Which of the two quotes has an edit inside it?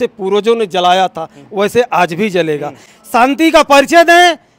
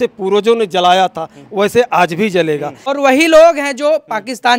second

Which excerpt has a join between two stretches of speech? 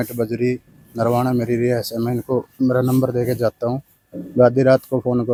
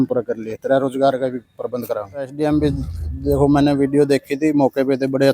second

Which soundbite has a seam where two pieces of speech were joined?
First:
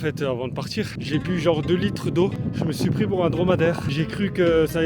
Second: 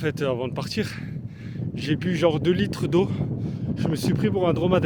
first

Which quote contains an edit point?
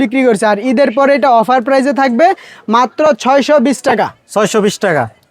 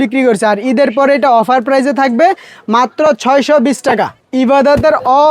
second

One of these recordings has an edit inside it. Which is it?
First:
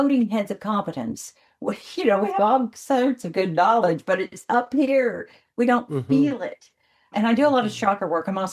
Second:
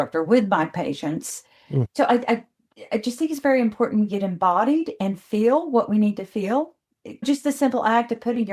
second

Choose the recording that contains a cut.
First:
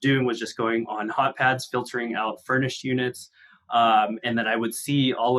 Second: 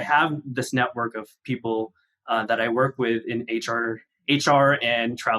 second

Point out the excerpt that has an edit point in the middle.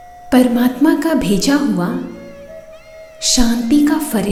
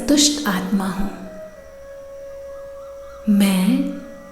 second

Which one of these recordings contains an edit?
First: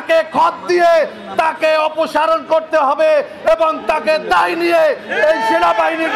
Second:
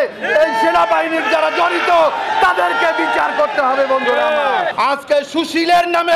second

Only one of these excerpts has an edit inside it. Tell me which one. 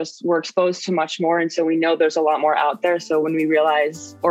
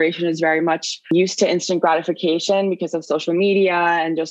second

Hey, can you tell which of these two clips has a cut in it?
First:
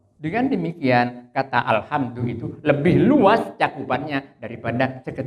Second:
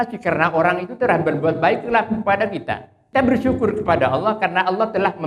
second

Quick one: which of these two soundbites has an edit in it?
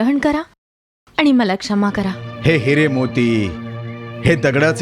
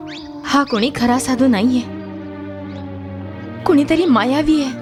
first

